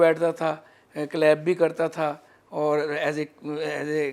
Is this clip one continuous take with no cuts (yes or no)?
yes